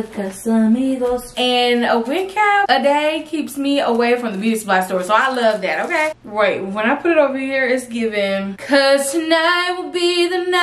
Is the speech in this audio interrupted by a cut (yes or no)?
yes